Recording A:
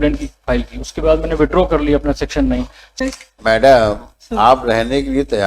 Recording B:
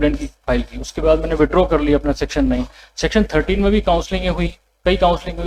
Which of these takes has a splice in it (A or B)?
A